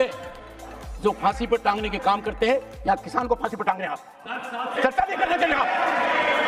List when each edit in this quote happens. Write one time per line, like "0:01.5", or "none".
none

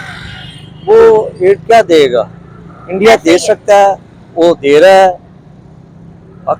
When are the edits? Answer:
none

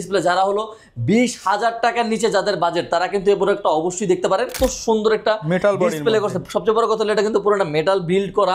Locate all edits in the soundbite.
0:04.5

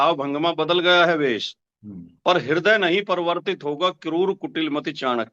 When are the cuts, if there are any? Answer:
none

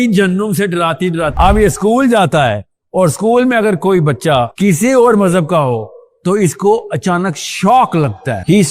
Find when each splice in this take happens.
0:01.3

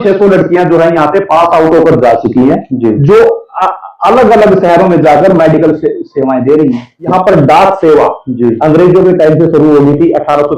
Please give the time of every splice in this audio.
0:07.0

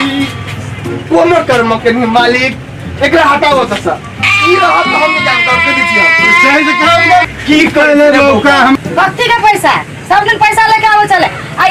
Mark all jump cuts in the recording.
0:08.8

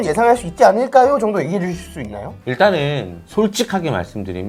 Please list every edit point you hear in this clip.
none

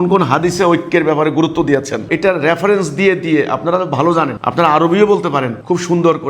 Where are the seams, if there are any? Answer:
0:02.0

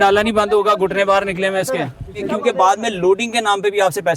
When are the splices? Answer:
0:02.3

